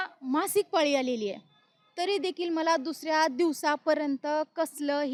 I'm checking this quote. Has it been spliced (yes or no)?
no